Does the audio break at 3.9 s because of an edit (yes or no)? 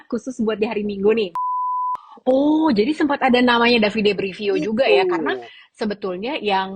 no